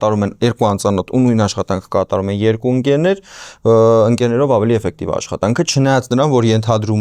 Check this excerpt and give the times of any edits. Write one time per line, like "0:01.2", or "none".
none